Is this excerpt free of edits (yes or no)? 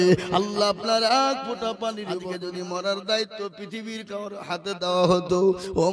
no